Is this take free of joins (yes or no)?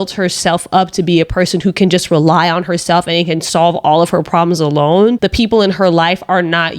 no